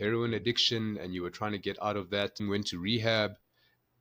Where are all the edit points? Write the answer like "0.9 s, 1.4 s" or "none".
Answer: 2.4 s